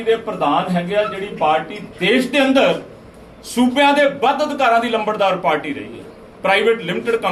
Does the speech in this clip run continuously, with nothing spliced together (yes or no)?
yes